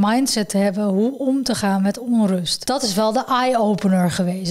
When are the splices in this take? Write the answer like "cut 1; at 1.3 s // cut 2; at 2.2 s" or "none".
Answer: cut 1; at 2.5 s